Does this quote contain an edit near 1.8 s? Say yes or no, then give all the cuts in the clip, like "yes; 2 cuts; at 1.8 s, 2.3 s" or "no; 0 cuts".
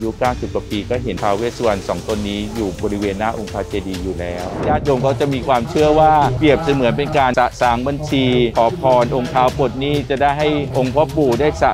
no; 4 cuts; at 4.7 s, 6.3 s, 7.3 s, 8.5 s